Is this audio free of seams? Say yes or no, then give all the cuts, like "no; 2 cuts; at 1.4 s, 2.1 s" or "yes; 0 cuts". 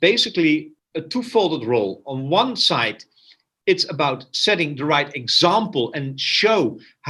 yes; 0 cuts